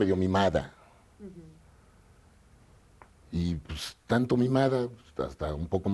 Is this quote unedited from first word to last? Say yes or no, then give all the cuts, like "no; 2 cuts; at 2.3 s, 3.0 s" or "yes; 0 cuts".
yes; 0 cuts